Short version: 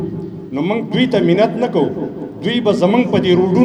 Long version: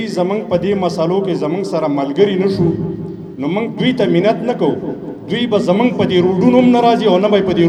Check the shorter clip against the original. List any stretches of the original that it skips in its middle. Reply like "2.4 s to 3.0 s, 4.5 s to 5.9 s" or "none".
none